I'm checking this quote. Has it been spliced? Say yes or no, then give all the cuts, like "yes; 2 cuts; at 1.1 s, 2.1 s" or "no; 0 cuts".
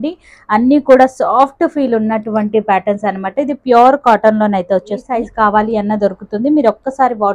yes; 1 cut; at 5.2 s